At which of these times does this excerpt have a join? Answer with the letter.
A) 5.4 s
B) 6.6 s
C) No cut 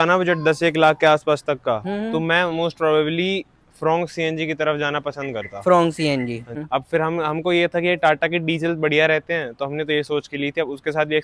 B